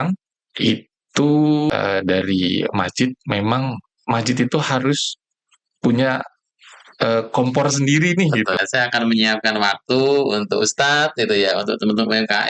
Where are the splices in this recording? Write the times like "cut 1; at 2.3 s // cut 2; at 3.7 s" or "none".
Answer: cut 1; at 1.7 s // cut 2; at 8.6 s